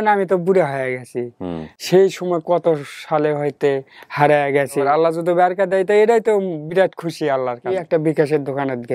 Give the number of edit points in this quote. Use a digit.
2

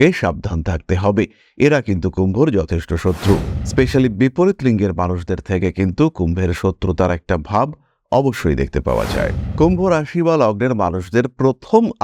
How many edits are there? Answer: 2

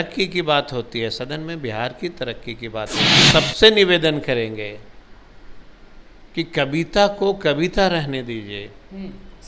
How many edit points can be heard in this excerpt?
1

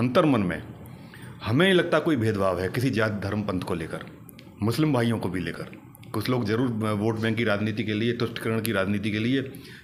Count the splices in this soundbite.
0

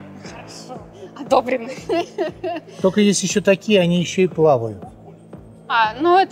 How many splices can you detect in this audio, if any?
0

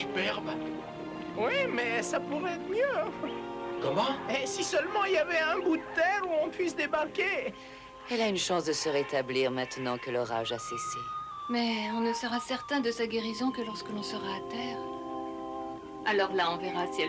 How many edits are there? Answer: 1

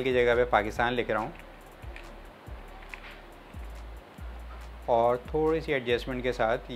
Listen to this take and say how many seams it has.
0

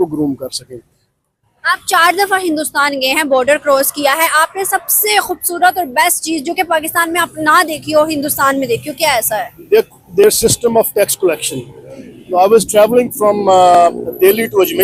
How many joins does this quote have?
0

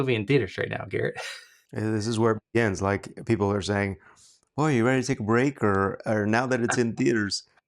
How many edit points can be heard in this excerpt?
1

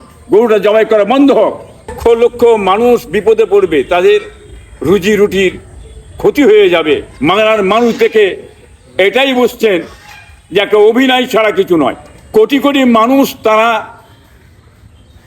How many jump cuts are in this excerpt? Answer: 3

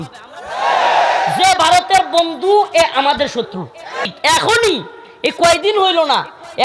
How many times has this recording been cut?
1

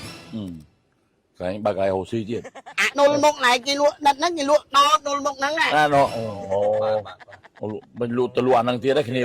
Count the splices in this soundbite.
2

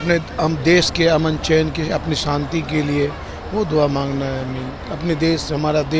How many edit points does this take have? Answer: 0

